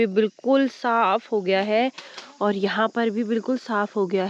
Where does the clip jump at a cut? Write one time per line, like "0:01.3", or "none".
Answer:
none